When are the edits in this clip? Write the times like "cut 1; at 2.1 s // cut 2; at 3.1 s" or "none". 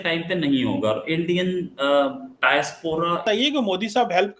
cut 1; at 3.2 s